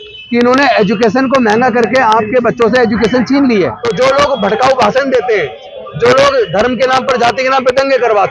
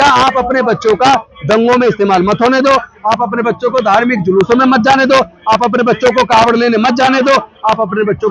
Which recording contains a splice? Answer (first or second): first